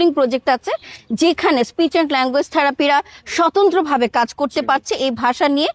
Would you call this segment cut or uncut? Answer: uncut